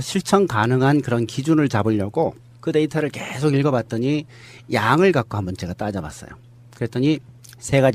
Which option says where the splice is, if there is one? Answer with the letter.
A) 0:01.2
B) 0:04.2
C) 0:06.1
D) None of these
A